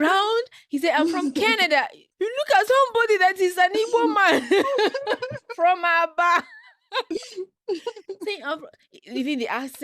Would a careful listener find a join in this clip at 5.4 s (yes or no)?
no